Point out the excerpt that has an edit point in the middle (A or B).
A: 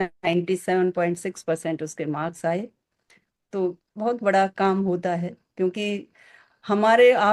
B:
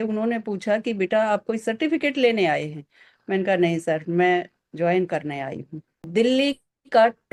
B